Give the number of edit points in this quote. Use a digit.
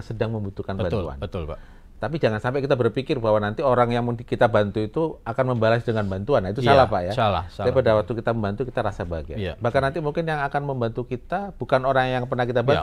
0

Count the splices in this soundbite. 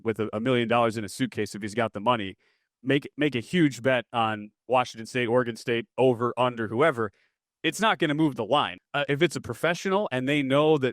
1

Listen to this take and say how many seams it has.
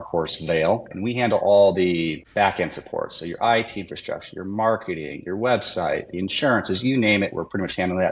2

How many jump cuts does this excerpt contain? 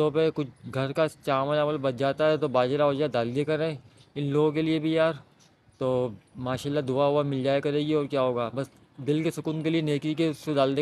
0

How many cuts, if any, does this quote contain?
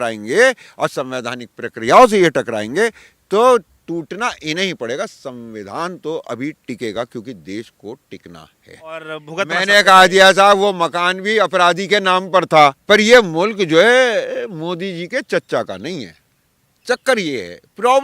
2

